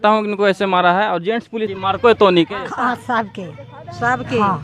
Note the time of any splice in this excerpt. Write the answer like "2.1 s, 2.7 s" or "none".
1.7 s